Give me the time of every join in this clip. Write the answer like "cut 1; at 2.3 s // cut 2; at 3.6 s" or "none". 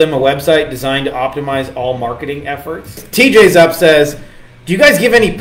cut 1; at 3.0 s